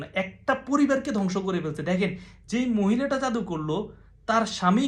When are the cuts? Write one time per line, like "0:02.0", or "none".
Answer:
none